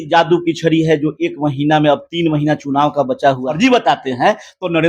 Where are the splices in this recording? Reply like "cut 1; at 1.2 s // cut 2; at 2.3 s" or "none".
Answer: cut 1; at 3.5 s